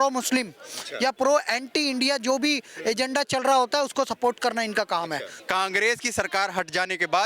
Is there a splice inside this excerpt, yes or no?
yes